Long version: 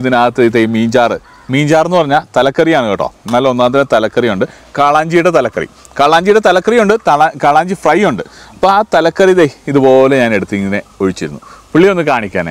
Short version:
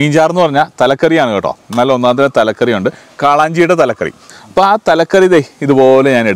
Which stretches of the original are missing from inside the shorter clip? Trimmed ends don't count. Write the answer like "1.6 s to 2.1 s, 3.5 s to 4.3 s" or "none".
5.8 s to 8.3 s